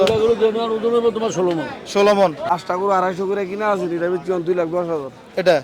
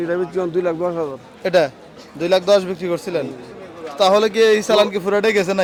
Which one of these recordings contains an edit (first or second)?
first